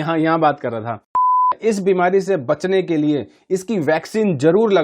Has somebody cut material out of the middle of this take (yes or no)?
yes